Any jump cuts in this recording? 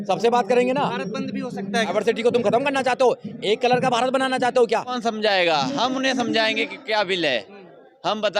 yes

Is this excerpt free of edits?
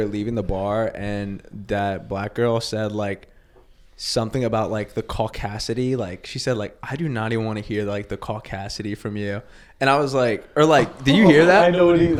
yes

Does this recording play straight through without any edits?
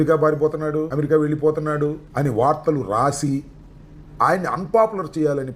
no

